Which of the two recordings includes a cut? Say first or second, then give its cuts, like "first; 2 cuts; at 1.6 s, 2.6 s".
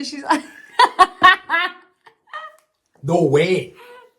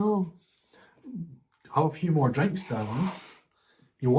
first; 1 cut; at 2.7 s